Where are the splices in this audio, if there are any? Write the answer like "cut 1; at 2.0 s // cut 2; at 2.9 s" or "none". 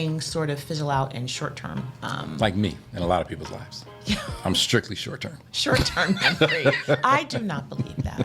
cut 1; at 1.8 s